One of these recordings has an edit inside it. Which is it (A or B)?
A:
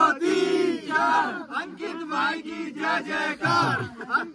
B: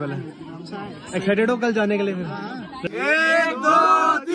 B